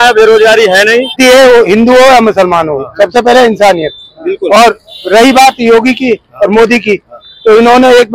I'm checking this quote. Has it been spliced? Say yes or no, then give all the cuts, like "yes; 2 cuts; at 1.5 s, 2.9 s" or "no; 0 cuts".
yes; 1 cut; at 1.2 s